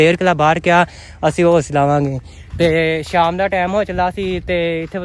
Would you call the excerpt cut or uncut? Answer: uncut